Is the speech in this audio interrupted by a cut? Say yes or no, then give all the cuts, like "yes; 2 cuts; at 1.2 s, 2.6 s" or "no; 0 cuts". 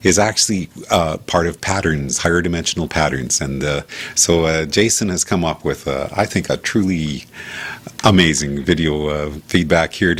no; 0 cuts